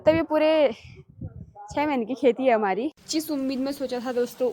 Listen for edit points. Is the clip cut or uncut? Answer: cut